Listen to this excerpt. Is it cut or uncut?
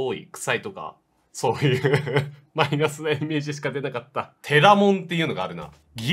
cut